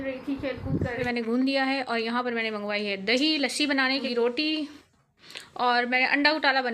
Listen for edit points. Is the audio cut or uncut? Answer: cut